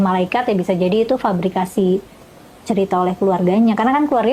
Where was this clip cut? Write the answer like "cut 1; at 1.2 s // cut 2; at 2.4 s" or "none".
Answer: none